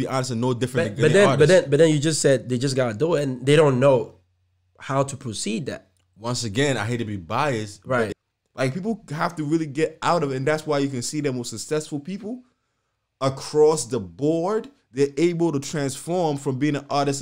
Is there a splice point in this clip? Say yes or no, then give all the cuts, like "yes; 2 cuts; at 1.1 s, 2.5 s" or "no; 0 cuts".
yes; 1 cut; at 8.1 s